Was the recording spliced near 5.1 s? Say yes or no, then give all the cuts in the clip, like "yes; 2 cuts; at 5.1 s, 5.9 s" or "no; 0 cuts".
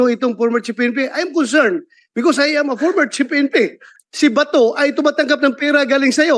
no; 1 cut; at 3.9 s